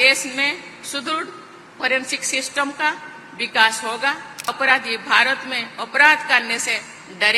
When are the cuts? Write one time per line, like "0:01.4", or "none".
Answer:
0:04.5